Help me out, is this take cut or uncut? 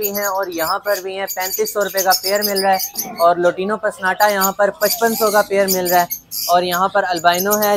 uncut